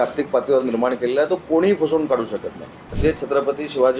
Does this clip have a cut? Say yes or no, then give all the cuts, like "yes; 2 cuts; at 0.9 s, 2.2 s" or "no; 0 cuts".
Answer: yes; 1 cut; at 3.0 s